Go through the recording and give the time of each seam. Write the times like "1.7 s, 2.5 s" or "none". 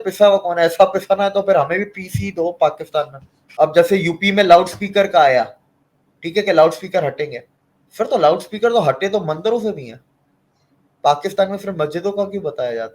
3.4 s